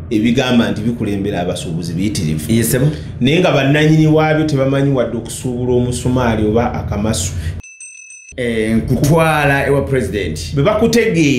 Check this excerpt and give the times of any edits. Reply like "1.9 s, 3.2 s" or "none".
7.7 s